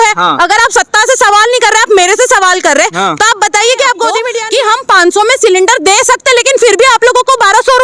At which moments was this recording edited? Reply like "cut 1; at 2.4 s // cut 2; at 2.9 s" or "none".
cut 1; at 4.3 s